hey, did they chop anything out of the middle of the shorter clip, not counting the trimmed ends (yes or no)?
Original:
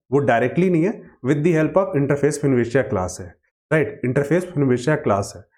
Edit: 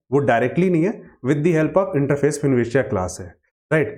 no